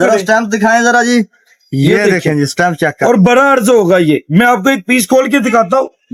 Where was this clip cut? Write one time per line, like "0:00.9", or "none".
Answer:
none